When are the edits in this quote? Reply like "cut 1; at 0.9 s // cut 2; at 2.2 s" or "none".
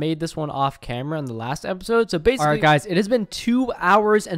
cut 1; at 2.4 s